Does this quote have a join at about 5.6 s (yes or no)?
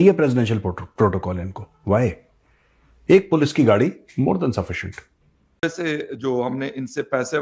yes